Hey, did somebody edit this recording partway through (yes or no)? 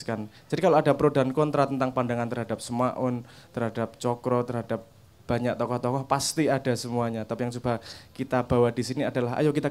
no